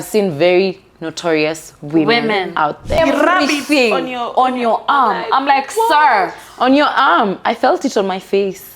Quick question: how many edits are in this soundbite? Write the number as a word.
one